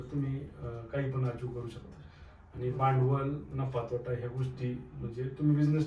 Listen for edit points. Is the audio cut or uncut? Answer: uncut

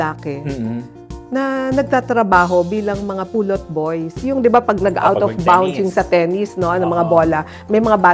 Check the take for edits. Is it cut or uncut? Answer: uncut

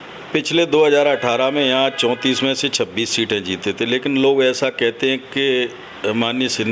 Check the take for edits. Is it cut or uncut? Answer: uncut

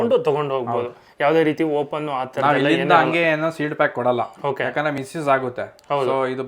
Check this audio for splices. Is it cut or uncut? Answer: uncut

